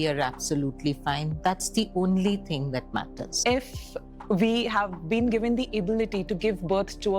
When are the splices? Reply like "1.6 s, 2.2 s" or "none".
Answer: 3.4 s